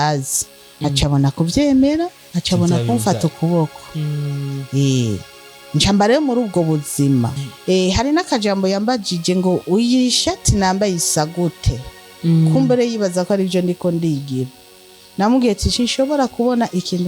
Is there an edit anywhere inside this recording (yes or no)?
yes